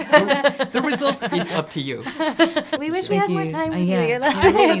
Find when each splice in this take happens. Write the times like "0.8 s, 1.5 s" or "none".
2.8 s